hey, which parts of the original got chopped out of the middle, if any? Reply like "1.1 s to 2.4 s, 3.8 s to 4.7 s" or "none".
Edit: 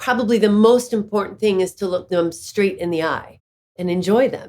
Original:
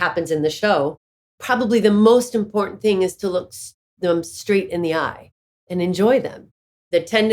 3.5 s to 4.0 s